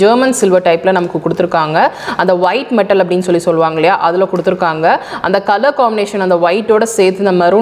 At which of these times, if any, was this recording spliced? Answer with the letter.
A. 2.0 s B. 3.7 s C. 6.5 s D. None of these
D